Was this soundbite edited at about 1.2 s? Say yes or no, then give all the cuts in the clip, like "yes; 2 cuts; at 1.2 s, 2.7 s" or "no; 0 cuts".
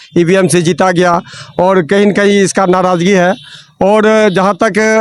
no; 0 cuts